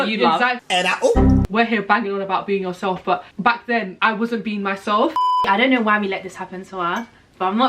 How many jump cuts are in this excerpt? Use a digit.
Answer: 3